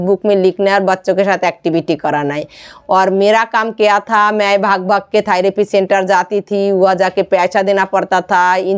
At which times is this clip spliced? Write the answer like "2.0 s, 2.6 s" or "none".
none